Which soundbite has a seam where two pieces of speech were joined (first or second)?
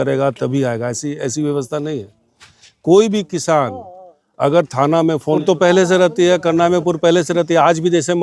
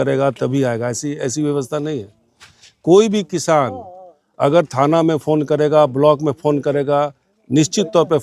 first